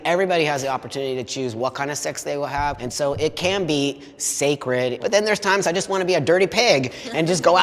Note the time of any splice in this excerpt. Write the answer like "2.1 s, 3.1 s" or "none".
2.9 s, 5.0 s